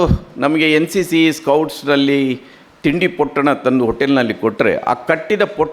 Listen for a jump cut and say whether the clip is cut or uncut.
uncut